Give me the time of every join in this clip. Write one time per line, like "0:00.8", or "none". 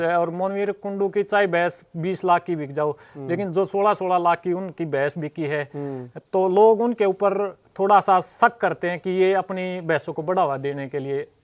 none